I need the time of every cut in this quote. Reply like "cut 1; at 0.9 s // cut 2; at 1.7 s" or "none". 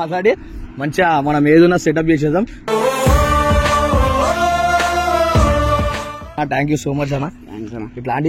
cut 1; at 6.3 s